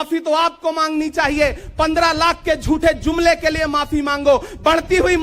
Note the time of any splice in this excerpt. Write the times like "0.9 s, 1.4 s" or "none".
none